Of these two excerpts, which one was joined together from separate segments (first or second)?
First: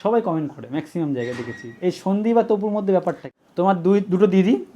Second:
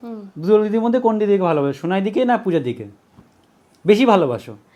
first